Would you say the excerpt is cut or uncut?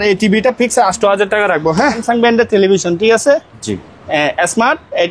cut